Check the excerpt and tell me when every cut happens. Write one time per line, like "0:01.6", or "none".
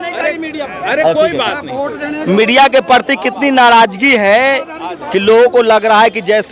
none